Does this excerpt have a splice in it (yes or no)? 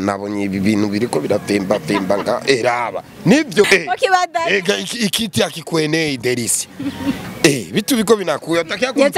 yes